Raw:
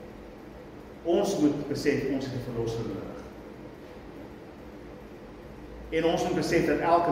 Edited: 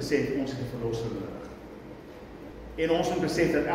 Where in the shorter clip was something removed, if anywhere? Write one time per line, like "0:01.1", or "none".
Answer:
0:02.5